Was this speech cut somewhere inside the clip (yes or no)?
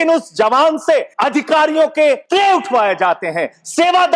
yes